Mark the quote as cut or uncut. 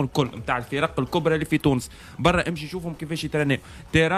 uncut